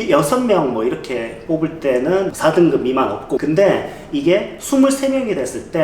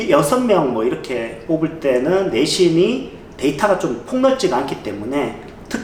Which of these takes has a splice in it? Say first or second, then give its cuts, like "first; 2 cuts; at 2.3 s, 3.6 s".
first; 2 cuts; at 2.3 s, 3.4 s